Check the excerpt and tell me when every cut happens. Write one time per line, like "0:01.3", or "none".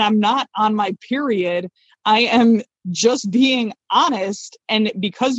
none